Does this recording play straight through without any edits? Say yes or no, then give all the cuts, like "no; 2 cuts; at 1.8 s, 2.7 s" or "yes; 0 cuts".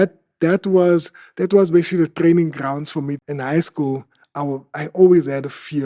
no; 1 cut; at 3.2 s